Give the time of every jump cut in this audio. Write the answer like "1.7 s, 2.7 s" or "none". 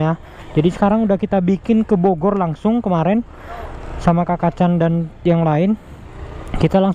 none